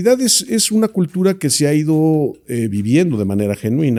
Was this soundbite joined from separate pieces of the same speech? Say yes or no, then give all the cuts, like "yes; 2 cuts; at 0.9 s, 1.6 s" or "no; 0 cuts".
no; 0 cuts